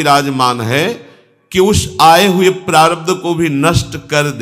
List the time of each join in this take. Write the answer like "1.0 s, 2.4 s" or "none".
none

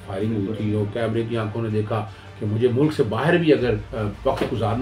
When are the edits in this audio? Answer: 2.2 s, 3.9 s

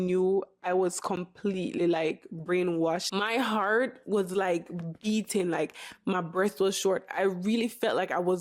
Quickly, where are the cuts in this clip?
3.1 s

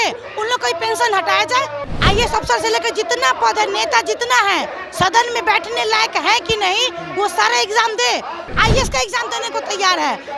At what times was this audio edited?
1.8 s, 8.5 s

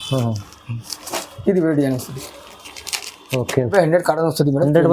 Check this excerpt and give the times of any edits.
3.7 s

